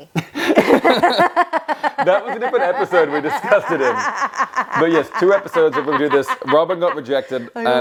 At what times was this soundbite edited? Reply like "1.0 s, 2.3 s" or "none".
none